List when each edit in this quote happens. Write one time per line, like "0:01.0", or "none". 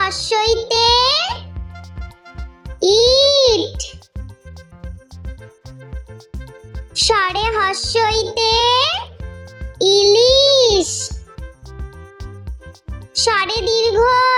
none

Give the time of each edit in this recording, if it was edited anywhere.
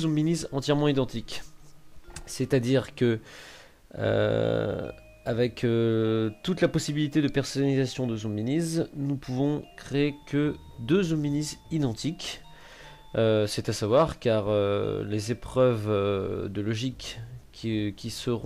0:04.8

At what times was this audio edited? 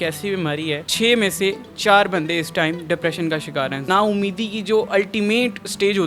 0:03.8

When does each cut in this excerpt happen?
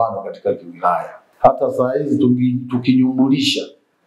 0:01.2

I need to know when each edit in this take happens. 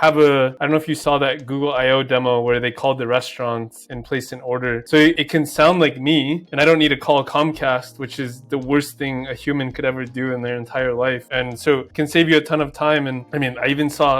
0:11.3

